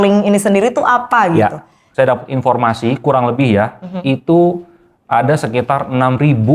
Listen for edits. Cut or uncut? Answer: cut